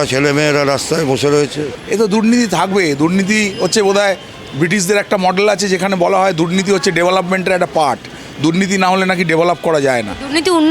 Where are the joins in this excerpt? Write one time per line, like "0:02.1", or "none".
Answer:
0:01.7